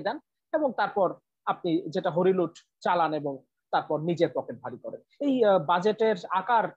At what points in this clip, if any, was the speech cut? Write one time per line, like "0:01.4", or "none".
0:05.1